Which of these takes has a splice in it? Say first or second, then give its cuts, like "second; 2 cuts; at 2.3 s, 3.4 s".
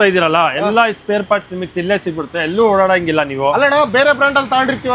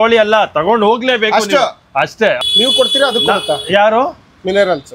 second; 1 cut; at 2.4 s